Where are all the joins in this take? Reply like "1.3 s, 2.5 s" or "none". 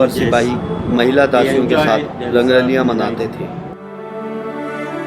none